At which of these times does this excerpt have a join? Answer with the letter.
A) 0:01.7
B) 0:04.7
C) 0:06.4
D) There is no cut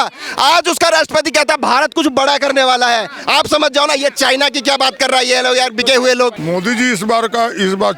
C